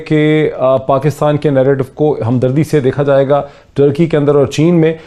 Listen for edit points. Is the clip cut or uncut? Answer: uncut